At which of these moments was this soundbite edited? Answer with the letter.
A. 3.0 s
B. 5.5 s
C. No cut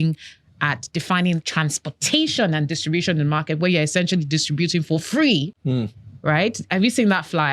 C